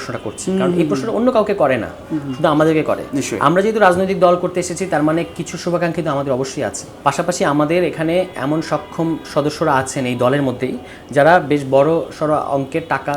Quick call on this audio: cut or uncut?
cut